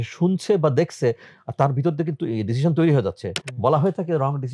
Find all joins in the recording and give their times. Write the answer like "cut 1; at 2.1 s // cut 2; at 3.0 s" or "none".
none